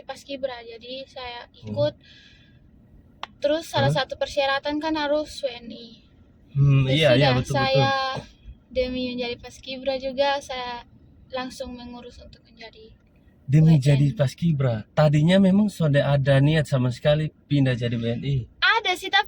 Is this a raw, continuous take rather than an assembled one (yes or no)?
yes